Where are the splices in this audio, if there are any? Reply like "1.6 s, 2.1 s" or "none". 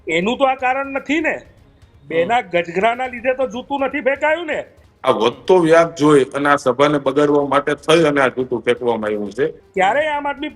4.8 s, 9.6 s